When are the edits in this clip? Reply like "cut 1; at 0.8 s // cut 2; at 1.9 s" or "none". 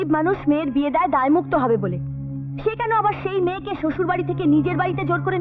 none